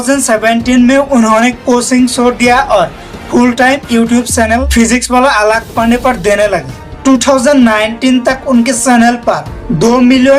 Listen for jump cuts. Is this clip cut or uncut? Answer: cut